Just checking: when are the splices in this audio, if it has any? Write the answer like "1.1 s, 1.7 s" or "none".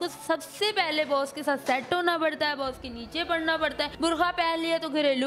3.9 s

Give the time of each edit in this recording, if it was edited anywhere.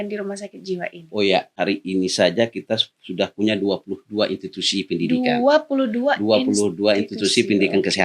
1.5 s

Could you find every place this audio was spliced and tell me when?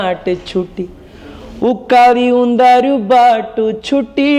none

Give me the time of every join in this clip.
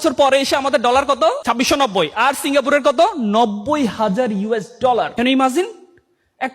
1.4 s, 5.1 s

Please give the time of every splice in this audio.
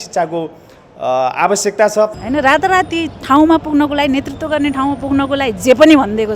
2.1 s

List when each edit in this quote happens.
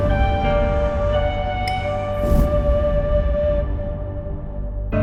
none

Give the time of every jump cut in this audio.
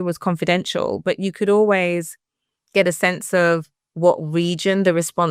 none

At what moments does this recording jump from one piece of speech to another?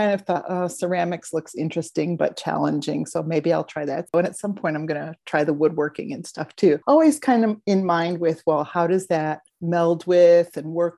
4.1 s, 6.8 s, 9.5 s

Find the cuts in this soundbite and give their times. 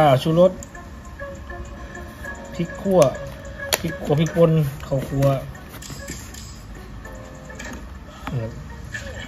none

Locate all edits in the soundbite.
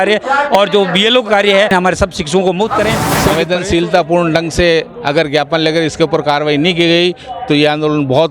1.7 s, 3.1 s

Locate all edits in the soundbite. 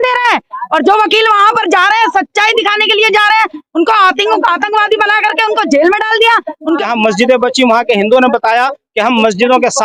6.8 s

